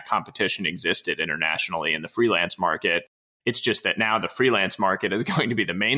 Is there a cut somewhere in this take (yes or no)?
no